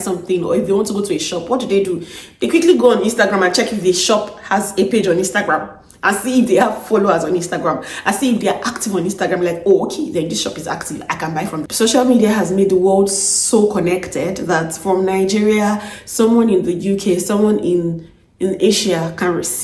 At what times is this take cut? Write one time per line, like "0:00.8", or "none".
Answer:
0:11.6